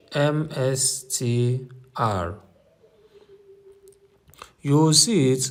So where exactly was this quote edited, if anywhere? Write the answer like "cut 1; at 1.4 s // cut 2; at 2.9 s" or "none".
none